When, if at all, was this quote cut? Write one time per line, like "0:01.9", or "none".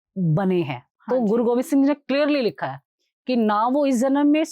none